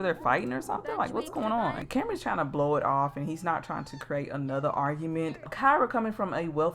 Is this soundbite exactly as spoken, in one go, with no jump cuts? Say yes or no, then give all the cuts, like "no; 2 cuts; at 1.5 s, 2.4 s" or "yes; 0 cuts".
no; 2 cuts; at 1.8 s, 5.5 s